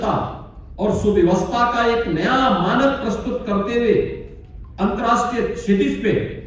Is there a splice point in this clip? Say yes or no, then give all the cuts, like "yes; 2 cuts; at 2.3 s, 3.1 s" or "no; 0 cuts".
no; 0 cuts